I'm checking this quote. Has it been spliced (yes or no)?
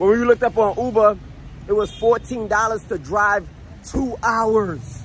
no